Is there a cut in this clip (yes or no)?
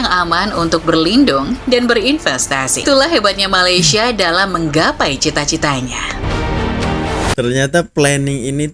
yes